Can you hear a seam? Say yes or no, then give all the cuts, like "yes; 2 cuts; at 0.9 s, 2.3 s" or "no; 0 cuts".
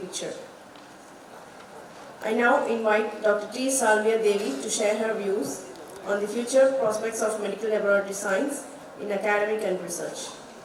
no; 0 cuts